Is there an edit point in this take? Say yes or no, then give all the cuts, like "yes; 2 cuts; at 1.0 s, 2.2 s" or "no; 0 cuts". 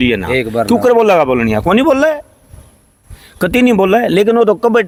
no; 0 cuts